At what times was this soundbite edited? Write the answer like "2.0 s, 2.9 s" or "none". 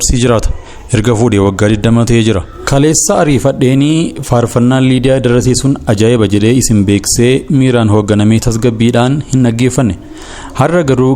2.5 s